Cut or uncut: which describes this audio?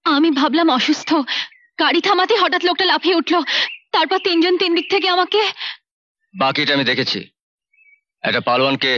uncut